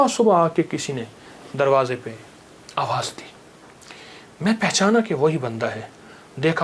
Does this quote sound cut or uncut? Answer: uncut